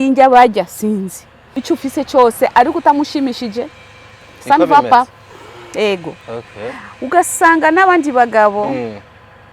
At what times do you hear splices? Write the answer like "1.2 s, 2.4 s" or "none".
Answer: 1.5 s